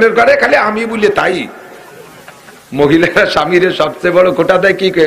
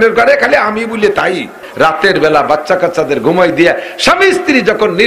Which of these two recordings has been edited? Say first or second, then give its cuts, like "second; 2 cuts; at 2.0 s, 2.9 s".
second; 1 cut; at 1.6 s